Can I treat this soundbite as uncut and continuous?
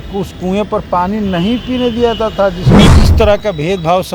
no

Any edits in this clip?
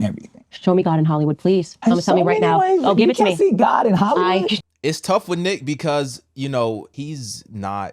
yes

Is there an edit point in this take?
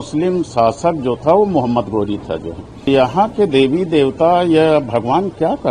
yes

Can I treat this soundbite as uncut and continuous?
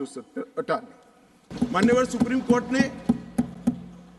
no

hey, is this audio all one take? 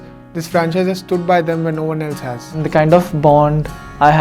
no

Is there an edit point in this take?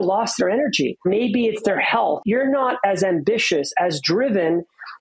yes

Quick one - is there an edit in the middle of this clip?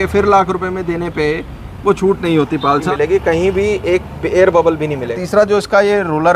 yes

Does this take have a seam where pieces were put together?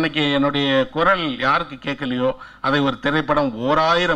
no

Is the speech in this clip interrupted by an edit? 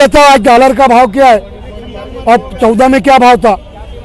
no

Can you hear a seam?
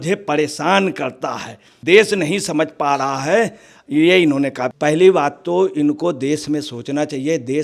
yes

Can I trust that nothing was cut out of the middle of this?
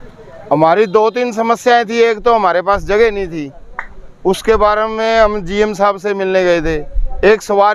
yes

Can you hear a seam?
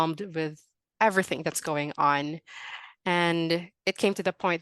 yes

